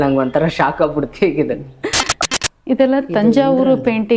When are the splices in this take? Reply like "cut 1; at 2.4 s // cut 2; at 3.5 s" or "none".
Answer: cut 1; at 2.1 s